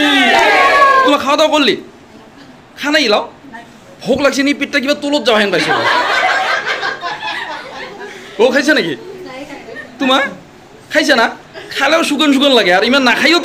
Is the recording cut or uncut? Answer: cut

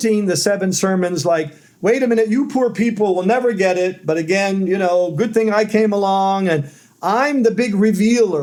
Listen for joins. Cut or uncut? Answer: uncut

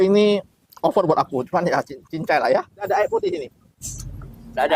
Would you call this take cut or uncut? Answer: cut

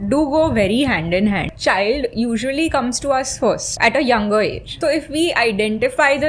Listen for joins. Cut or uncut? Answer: cut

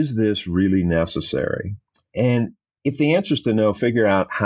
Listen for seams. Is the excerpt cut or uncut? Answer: uncut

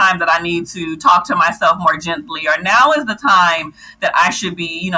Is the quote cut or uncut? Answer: uncut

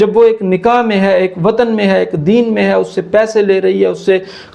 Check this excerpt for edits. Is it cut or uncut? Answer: uncut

